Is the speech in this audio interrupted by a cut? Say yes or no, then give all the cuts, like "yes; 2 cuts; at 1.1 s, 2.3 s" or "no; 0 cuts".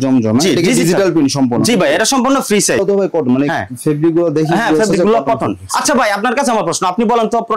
yes; 1 cut; at 2.8 s